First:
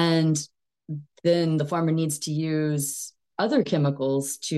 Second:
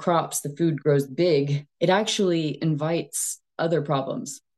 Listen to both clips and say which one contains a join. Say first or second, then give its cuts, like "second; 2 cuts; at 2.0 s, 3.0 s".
second; 1 cut; at 1.6 s